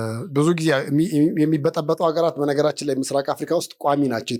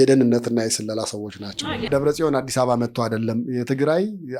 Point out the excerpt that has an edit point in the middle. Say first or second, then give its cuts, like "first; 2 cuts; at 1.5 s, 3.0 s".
second; 1 cut; at 1.9 s